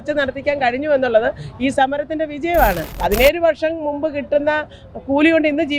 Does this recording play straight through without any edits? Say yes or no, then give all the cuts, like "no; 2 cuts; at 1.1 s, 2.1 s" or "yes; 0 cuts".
no; 1 cut; at 2.9 s